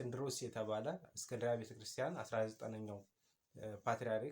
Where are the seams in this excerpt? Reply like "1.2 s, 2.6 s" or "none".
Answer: 1.1 s